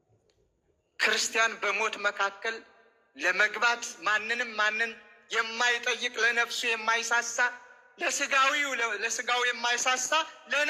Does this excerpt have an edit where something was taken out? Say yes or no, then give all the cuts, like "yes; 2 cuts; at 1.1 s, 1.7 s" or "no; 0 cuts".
no; 0 cuts